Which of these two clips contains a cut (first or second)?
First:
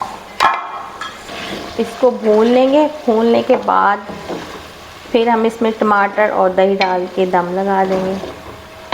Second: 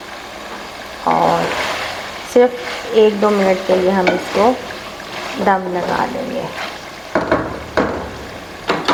first